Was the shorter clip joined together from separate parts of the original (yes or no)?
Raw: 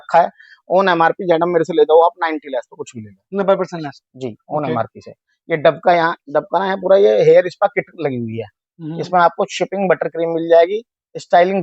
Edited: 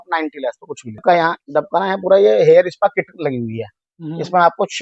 yes